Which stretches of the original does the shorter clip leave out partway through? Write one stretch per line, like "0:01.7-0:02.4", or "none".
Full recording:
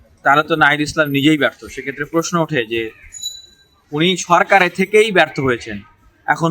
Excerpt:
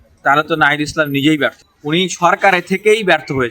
0:01.7-0:03.8